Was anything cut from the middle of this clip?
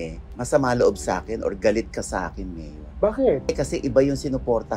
yes; 1 cut; at 3.5 s

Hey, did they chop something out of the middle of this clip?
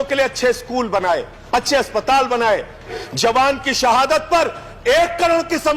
yes; 2 cuts; at 1.3 s, 2.9 s

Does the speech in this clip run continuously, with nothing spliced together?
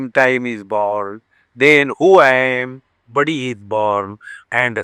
yes; 0 cuts

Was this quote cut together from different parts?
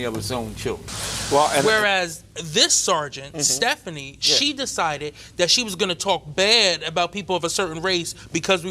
yes; 1 cut; at 1.6 s

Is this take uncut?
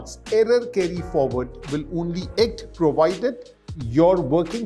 yes; 0 cuts

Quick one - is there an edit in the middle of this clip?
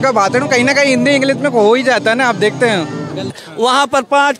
yes; 1 cut; at 3.3 s

